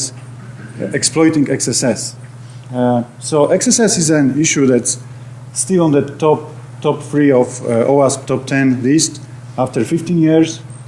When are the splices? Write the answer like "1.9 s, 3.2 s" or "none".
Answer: 1.9 s